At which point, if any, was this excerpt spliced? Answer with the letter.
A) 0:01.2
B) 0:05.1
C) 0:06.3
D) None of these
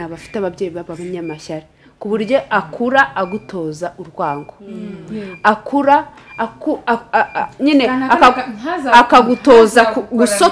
D